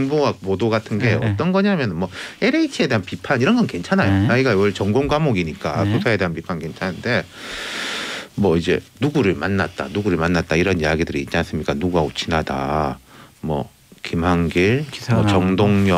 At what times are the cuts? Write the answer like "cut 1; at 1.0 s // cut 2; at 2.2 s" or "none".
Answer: none